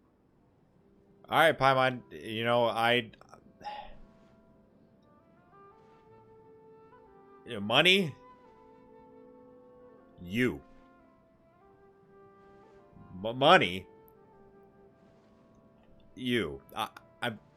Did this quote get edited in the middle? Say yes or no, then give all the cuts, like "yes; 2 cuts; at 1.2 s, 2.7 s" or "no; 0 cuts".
no; 0 cuts